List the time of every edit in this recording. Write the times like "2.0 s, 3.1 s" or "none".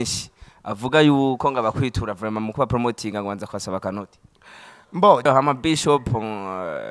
5.2 s